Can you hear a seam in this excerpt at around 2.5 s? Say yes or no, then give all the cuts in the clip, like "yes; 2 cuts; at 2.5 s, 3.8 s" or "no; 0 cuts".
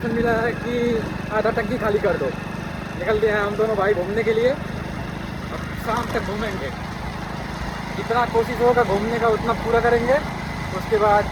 no; 0 cuts